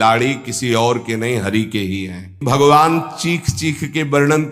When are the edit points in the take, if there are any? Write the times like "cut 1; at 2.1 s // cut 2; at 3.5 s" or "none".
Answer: cut 1; at 2.4 s